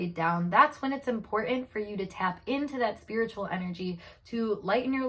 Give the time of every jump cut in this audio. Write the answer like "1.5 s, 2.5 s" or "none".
none